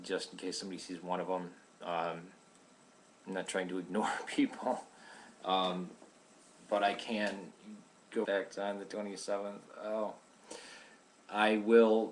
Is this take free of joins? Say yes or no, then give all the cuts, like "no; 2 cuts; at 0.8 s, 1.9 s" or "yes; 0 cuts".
yes; 0 cuts